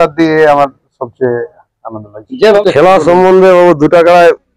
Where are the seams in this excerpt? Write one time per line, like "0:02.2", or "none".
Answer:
0:02.6